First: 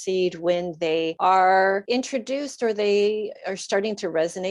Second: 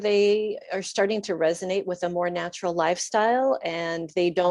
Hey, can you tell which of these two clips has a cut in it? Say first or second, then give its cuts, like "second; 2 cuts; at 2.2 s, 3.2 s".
first; 2 cuts; at 1.1 s, 1.8 s